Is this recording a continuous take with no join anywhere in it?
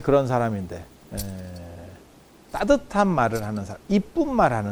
yes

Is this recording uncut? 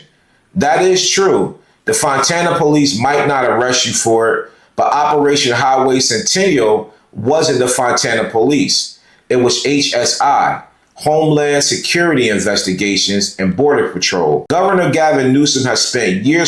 no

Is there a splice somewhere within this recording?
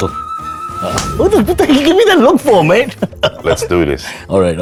no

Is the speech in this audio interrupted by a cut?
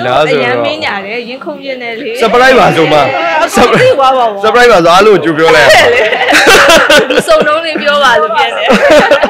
no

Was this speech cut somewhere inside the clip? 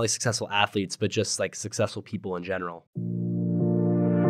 yes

